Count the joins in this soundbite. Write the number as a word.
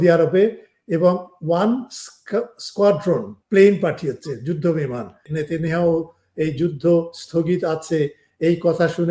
two